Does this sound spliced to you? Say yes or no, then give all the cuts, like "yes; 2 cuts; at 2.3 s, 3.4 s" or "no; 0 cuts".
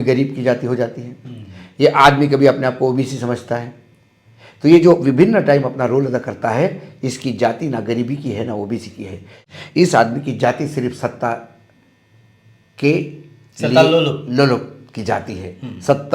yes; 1 cut; at 9.4 s